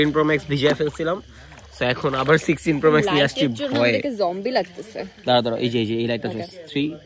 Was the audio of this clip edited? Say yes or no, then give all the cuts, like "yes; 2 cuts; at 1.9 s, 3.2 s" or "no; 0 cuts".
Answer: no; 0 cuts